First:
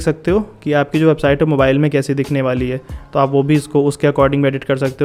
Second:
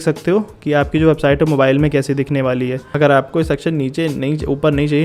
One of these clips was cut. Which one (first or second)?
second